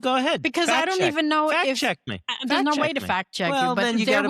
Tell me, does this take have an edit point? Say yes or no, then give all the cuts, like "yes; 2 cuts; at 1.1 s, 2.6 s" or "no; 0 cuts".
yes; 1 cut; at 3.3 s